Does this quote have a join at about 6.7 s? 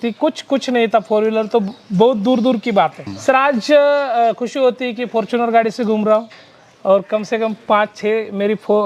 no; 1 cut; at 3.1 s

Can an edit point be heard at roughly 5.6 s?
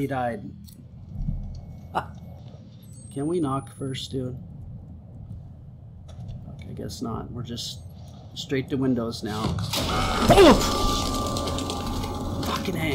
no; 1 cut; at 2.4 s

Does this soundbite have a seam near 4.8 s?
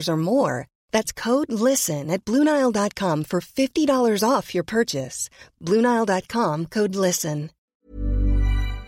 no; 1 cut; at 7.5 s

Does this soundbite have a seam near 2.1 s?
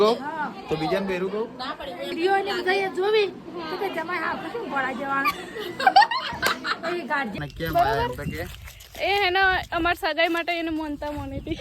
yes; 2 cuts; at 2.1 s, 7.3 s

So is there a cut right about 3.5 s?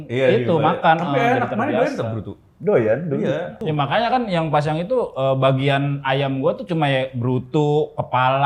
yes; 1 cut; at 3.5 s

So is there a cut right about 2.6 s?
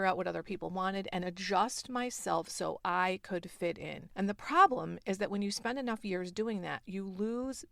no; 1 cut; at 4.0 s

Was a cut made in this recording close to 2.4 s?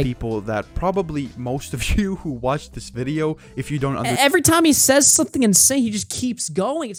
no; 0 cuts

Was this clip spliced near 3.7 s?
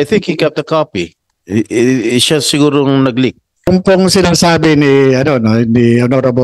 yes; 1 cut; at 3.7 s

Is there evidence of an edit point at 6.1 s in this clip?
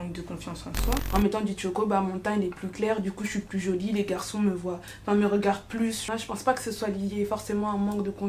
yes; 2 cuts; at 1.0 s, 6.1 s

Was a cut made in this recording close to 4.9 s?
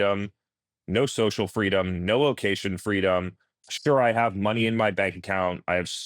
yes; 1 cut; at 4.9 s

